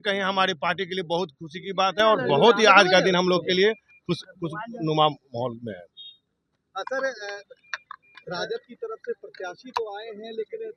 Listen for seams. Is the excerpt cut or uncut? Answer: uncut